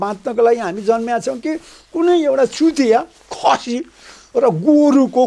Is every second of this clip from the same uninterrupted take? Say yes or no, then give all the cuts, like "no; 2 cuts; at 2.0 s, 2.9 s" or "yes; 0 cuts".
yes; 0 cuts